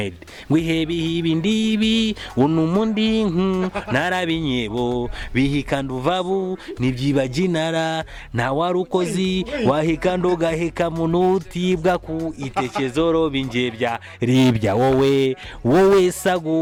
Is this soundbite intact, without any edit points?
yes; 0 cuts

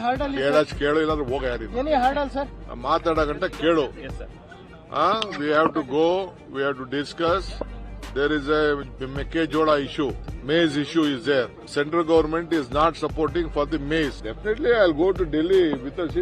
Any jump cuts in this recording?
yes; 3 cuts; at 10.3 s, 11.6 s, 14.3 s

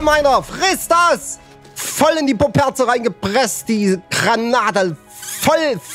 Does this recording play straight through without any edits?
yes; 0 cuts

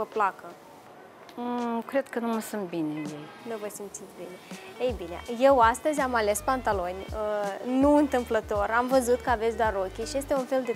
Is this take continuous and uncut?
yes; 0 cuts

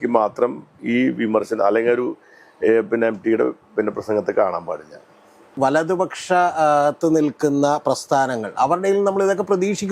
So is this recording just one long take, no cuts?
no; 1 cut; at 5.6 s

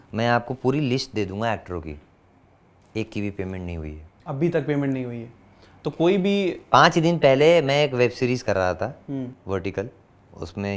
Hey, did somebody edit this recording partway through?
no; 0 cuts

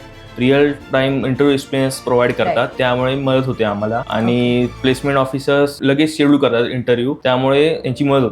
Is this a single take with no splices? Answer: no; 5 cuts; at 2.7 s, 4.1 s, 4.8 s, 5.8 s, 7.2 s

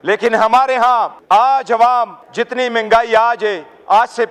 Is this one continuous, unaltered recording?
no; 2 cuts; at 1.2 s, 2.2 s

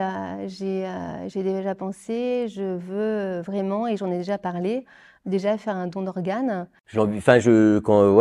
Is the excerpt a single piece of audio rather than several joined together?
no; 1 cut; at 6.8 s

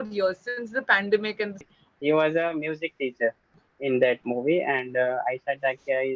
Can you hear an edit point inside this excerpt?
yes; 1 cut; at 1.7 s

